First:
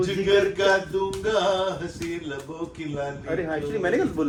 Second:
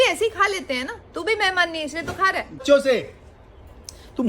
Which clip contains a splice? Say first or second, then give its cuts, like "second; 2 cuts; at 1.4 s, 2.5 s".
second; 1 cut; at 2.6 s